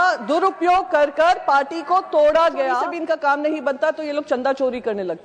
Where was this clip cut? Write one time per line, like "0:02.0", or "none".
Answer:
0:02.9